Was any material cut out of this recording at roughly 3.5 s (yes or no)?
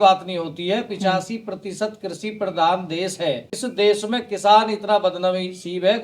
yes